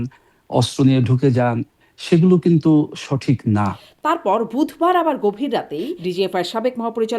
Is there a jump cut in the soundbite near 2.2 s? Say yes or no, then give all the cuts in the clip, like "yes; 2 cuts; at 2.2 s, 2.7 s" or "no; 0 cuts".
no; 2 cuts; at 3.9 s, 6.0 s